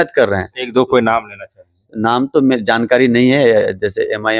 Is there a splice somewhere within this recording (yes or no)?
no